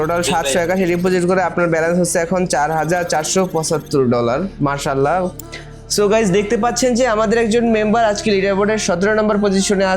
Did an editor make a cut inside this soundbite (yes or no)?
yes